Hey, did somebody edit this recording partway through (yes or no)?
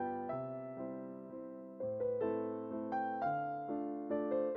no